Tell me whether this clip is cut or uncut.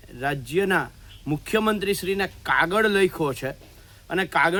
uncut